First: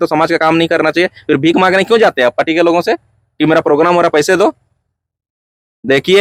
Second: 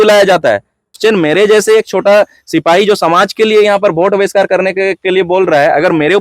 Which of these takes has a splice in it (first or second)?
second